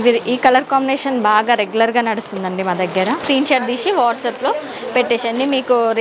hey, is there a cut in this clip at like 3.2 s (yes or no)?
yes